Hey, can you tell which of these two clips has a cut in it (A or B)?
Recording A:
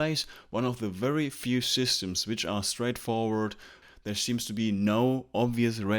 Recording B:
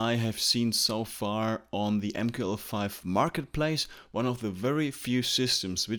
A